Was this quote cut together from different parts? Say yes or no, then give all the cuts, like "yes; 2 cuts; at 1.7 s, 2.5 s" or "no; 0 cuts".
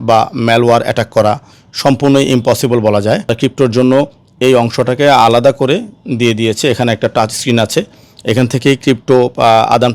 yes; 1 cut; at 3.3 s